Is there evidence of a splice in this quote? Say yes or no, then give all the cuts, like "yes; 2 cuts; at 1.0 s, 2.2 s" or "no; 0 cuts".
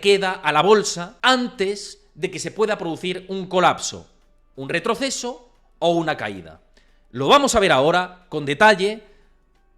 yes; 1 cut; at 1.0 s